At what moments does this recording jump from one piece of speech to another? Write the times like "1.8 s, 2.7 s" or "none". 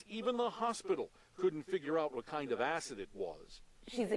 1.8 s